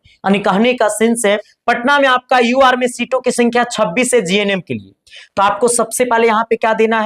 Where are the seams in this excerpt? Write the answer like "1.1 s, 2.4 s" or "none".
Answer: 1.5 s